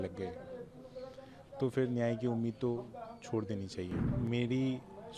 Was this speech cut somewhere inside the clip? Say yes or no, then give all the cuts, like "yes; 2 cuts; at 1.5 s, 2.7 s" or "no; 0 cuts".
yes; 1 cut; at 4.1 s